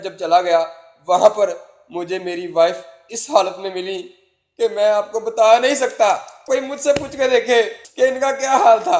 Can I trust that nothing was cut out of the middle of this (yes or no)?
no